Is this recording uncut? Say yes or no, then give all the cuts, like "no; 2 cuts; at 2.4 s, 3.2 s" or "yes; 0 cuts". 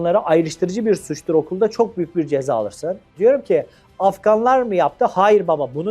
no; 1 cut; at 3.0 s